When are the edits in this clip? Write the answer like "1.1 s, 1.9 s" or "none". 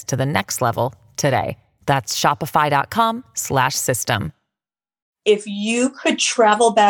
5.1 s